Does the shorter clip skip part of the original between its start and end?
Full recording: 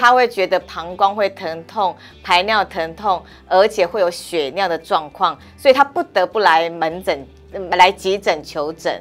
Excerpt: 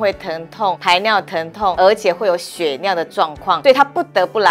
yes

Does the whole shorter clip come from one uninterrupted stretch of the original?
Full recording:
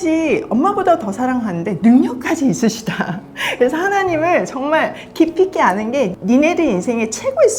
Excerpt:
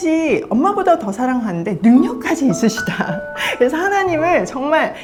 yes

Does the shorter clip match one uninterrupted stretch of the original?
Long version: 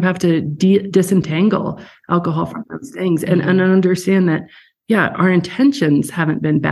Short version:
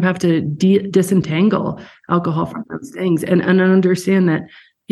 yes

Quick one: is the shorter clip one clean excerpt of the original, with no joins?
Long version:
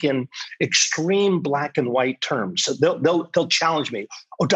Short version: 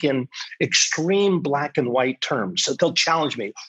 no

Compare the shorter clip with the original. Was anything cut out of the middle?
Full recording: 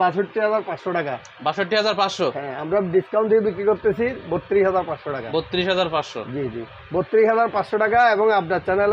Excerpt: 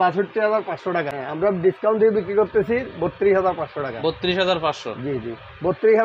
yes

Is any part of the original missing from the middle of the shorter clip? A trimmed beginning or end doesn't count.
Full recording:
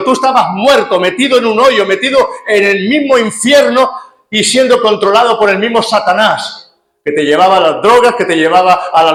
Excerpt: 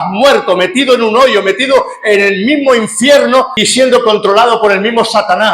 yes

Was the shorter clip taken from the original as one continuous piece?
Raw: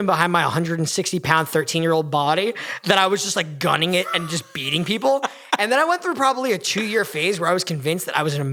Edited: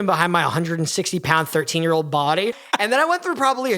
no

